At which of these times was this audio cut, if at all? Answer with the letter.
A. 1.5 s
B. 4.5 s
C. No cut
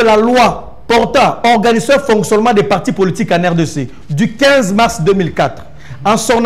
C